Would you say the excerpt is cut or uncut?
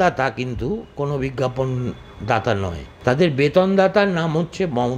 cut